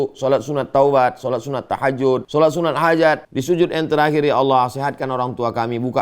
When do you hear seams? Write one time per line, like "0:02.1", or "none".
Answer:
0:02.3
0:03.3

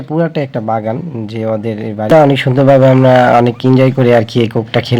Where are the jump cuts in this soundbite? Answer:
0:02.1

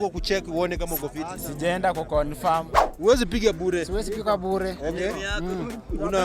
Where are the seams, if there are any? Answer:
0:02.8

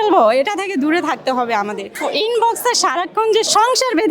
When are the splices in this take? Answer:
0:01.9

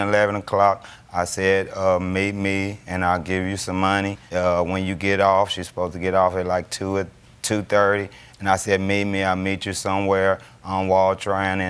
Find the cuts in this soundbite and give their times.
none

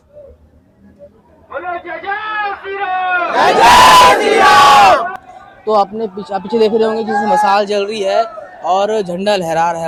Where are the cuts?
none

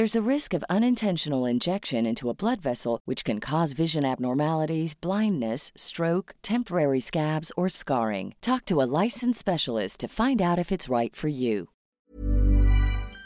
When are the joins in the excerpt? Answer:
0:12.0

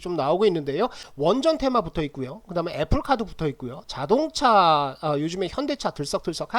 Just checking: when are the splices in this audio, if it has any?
0:01.0

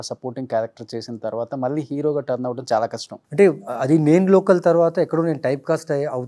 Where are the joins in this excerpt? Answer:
0:03.2

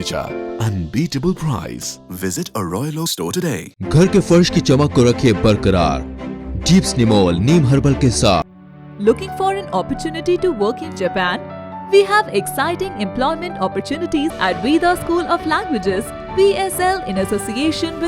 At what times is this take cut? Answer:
0:03.7
0:08.5
0:14.4

